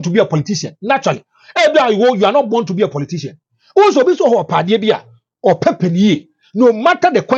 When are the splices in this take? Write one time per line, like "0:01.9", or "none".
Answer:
none